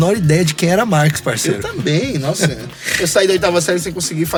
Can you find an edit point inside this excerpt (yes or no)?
no